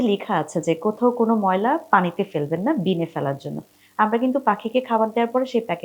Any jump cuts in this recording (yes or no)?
no